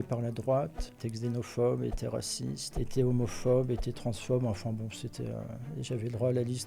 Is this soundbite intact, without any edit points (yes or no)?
yes